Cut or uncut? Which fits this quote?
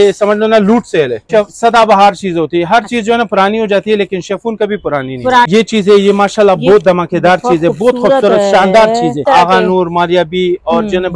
cut